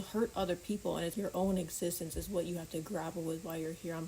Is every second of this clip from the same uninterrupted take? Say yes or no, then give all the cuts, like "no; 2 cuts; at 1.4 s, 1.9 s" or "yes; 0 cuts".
no; 1 cut; at 1.1 s